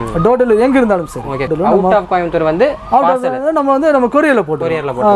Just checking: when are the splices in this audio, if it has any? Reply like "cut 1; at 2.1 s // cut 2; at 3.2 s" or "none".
cut 1; at 1.5 s

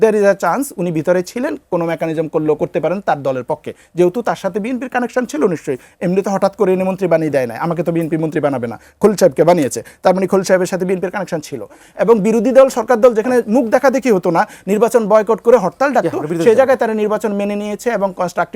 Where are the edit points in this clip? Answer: cut 1; at 11.9 s

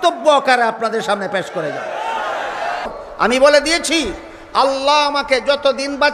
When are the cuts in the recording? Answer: cut 1; at 2.9 s

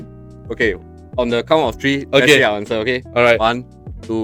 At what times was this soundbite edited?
none

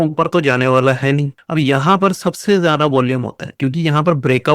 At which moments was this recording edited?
cut 1; at 1.3 s

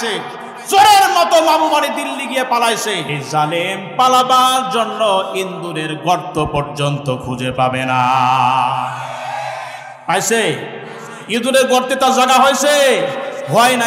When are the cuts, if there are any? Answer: cut 1; at 3.1 s

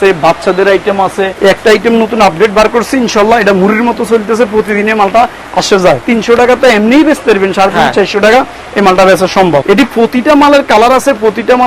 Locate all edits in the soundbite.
cut 1; at 1.3 s // cut 2; at 6.0 s // cut 3; at 9.6 s

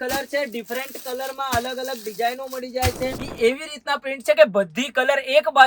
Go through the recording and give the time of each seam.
cut 1; at 3.3 s

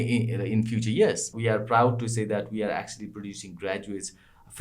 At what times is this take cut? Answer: cut 1; at 1.3 s

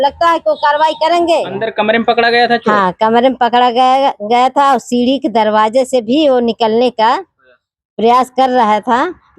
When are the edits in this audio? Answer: cut 1; at 1.6 s

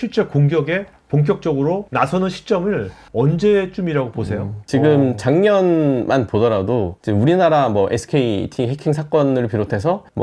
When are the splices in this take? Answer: cut 1; at 4.5 s

